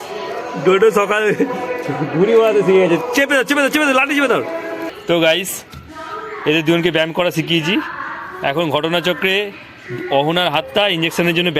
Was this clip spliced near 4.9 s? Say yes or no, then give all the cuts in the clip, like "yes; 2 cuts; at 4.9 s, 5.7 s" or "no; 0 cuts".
yes; 1 cut; at 4.9 s